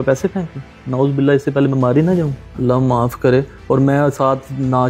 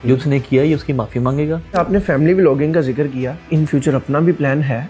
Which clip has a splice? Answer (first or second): second